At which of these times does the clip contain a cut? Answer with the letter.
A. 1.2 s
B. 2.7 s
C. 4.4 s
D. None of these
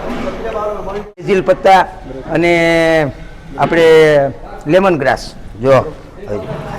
A